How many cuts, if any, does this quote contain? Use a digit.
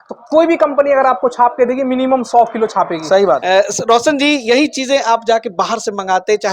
1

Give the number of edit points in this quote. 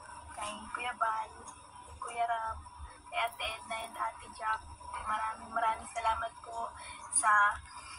0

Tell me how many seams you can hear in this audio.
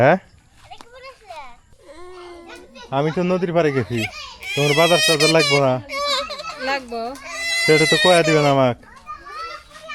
1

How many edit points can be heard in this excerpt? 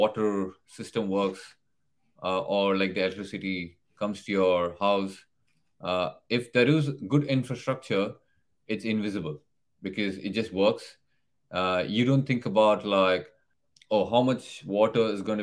0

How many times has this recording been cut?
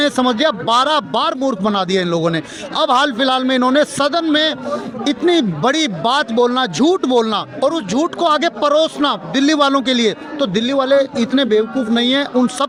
0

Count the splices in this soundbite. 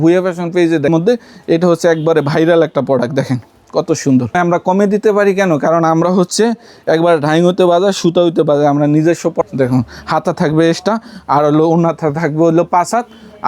3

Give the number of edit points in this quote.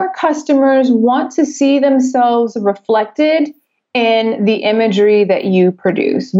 0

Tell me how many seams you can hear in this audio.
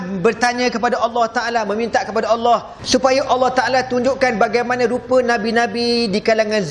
1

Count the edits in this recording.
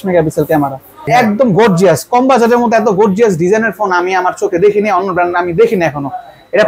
1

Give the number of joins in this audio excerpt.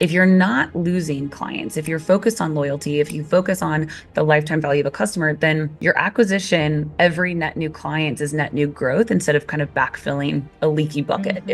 0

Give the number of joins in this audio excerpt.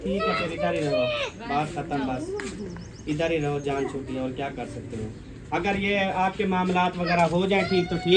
0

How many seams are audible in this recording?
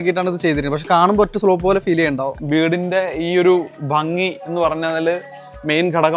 1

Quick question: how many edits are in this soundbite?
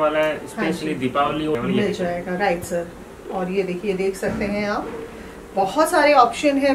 1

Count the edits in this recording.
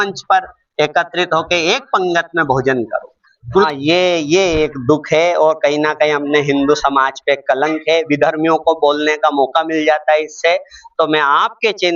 1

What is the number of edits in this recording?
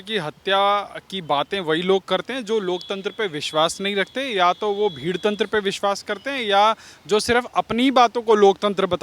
0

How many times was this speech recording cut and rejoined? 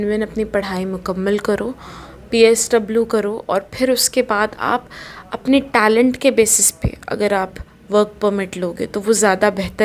0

